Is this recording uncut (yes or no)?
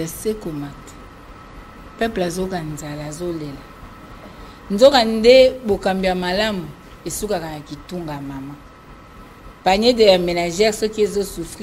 yes